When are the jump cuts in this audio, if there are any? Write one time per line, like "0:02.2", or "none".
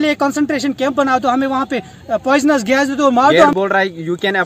0:03.5